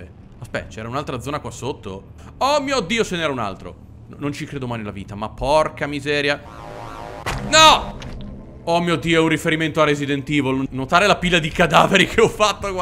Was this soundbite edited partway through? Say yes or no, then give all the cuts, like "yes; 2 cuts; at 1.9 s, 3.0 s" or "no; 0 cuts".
yes; 3 cuts; at 2.2 s, 6.6 s, 10.7 s